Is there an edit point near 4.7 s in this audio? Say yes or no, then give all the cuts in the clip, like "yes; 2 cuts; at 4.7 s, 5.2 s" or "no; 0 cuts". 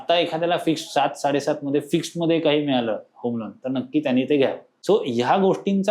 yes; 1 cut; at 4.7 s